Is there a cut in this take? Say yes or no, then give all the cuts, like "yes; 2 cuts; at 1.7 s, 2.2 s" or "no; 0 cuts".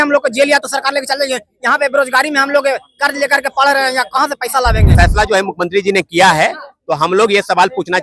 yes; 1 cut; at 4.9 s